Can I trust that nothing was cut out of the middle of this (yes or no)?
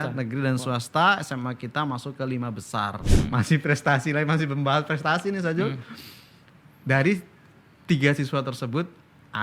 no